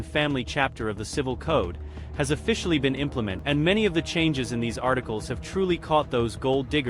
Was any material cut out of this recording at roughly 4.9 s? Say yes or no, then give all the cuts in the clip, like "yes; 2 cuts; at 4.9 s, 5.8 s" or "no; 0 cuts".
no; 1 cut; at 3.4 s